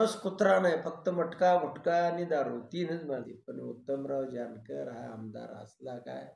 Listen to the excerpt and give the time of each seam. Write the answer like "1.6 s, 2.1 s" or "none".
3.3 s